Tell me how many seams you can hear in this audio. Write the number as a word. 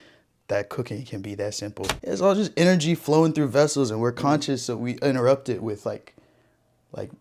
one